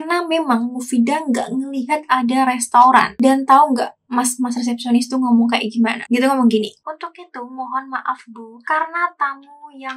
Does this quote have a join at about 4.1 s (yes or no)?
no